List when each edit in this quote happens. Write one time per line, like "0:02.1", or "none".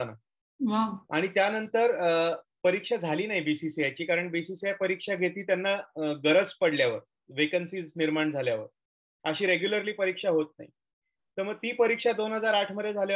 none